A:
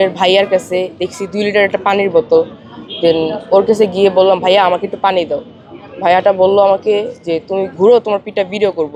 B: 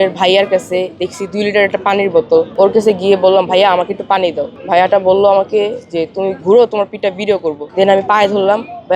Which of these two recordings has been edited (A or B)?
B